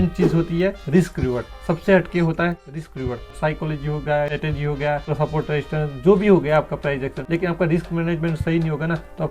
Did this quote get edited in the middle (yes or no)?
yes